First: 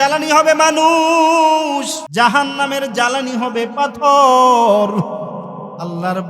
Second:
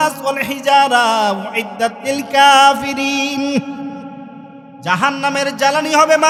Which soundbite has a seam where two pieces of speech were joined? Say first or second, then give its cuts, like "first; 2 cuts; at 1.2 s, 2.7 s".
first; 1 cut; at 2.0 s